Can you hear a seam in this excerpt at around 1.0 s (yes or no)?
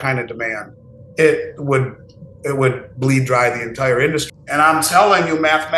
no